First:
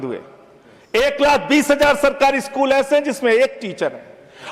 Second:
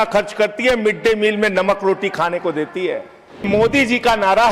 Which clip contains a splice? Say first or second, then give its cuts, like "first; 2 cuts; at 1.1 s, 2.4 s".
second; 1 cut; at 3.5 s